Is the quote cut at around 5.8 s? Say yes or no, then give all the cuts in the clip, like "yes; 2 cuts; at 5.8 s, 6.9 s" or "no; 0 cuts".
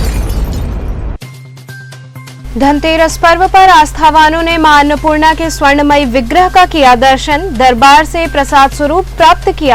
no; 1 cut; at 2.4 s